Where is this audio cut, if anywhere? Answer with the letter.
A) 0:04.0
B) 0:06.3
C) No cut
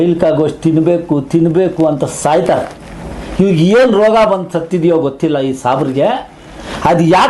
C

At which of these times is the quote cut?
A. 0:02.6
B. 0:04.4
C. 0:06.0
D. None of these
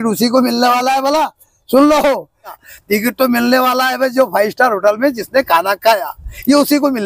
A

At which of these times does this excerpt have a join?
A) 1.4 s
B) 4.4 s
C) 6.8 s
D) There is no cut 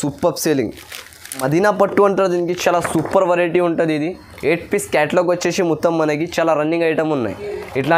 A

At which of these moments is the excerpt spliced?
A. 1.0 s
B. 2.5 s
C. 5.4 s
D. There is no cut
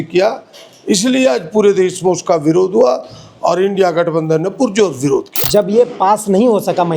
C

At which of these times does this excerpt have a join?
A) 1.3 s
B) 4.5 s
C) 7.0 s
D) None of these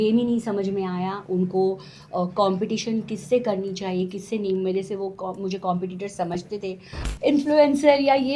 C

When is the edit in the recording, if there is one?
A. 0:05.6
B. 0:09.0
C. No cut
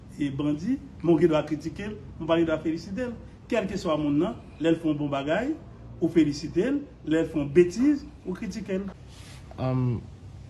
B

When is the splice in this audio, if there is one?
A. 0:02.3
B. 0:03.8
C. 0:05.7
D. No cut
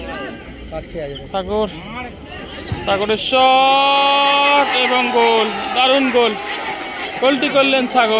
D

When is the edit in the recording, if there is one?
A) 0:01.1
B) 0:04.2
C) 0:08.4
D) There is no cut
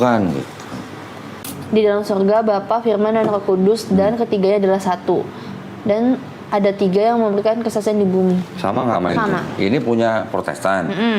A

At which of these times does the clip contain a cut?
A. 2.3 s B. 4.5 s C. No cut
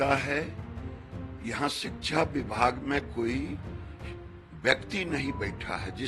C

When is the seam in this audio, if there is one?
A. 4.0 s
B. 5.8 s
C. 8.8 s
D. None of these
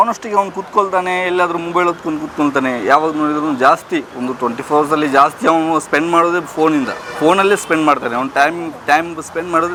D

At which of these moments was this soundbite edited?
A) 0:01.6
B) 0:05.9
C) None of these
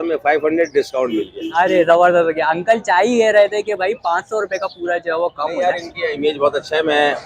C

